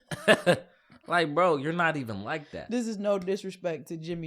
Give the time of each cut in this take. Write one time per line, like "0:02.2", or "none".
none

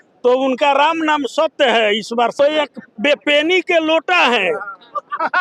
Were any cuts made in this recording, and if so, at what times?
0:02.4

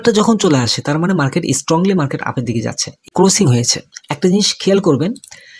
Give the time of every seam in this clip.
0:03.1

